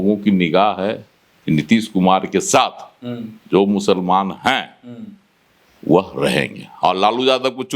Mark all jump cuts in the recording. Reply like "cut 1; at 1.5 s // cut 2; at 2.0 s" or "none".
cut 1; at 6.7 s